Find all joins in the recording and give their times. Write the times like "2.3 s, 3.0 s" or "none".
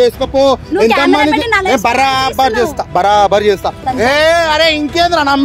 3.8 s